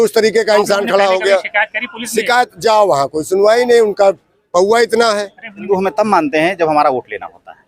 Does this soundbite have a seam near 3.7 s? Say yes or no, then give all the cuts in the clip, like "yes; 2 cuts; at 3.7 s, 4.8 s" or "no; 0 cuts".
no; 1 cut; at 5.7 s